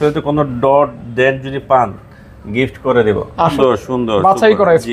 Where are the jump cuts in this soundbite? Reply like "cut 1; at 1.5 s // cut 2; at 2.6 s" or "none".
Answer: cut 1; at 3.6 s